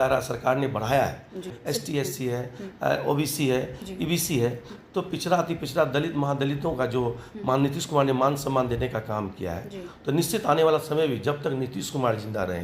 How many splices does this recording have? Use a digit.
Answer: 1